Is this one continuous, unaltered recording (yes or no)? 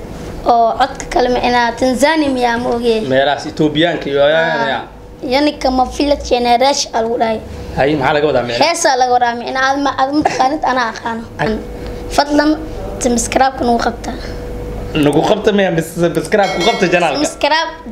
no